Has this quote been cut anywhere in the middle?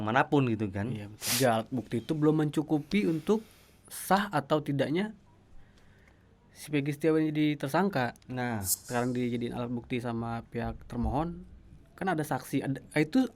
yes; 2 cuts; at 1.3 s, 8.9 s

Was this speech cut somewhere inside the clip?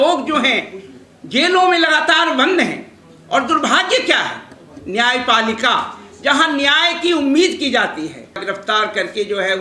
yes; 1 cut; at 8.4 s

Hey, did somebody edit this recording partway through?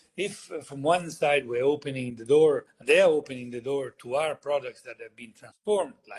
no; 0 cuts

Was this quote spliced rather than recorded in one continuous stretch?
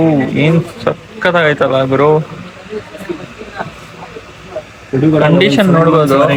no; 0 cuts

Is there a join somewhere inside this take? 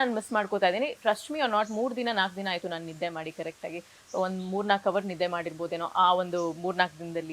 no; 0 cuts

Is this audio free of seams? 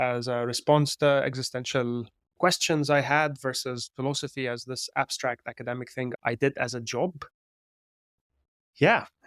no; 1 cut; at 6.1 s

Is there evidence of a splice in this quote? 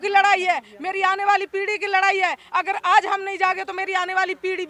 no; 0 cuts

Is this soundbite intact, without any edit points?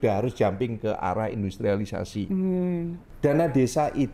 no; 1 cut; at 3.0 s

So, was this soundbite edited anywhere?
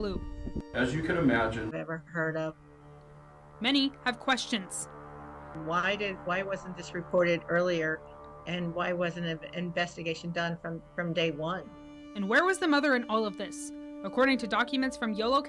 yes; 1 cut; at 1.7 s

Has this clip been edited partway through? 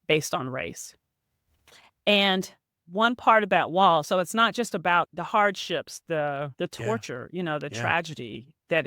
yes; 1 cut; at 5.1 s

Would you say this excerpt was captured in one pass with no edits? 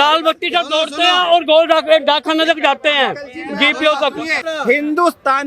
no; 1 cut; at 4.4 s

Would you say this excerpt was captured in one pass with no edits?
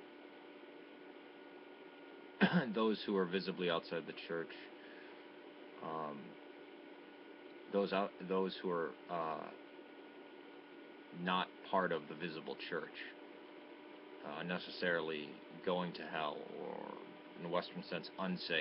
yes; 0 cuts

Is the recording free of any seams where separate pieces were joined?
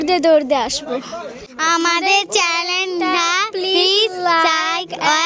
no; 1 cut; at 1.5 s

